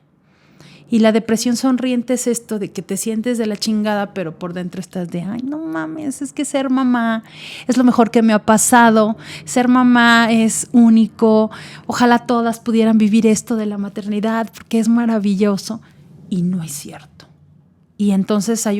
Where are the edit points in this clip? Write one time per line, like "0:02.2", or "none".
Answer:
none